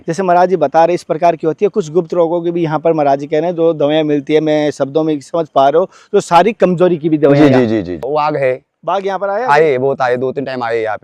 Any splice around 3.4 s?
no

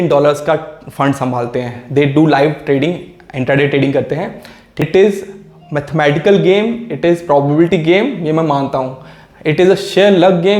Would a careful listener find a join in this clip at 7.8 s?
no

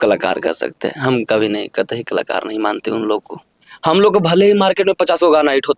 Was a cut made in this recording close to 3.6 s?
yes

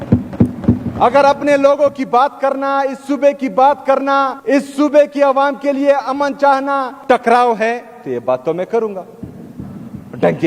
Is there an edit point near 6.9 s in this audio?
yes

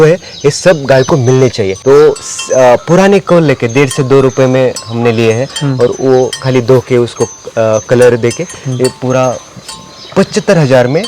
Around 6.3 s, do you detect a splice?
no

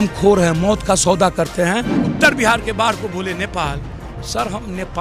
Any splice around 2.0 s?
yes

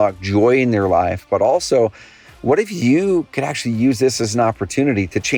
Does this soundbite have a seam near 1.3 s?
no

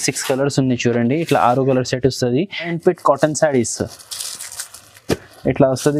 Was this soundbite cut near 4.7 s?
no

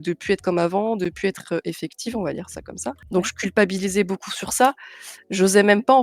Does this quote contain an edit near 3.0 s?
yes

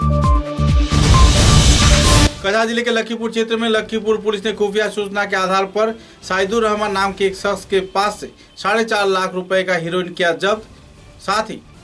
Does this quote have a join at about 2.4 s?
yes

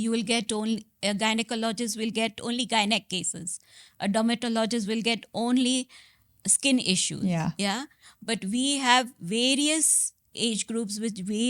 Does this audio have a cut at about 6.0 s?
no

